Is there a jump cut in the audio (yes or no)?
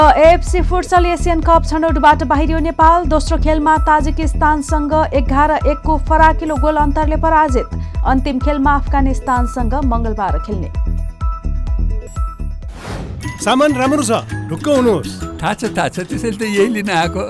yes